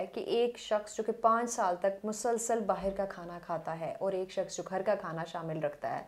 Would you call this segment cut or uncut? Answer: uncut